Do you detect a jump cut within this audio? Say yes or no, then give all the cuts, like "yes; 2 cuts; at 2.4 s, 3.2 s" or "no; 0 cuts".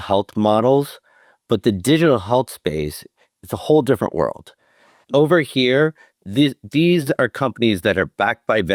no; 0 cuts